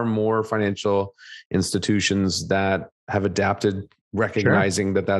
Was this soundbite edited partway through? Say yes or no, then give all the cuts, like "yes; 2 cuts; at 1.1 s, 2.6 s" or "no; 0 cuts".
yes; 2 cuts; at 2.9 s, 3.9 s